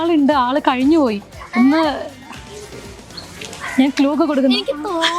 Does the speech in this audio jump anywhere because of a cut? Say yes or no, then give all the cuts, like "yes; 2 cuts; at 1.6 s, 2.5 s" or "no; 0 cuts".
no; 0 cuts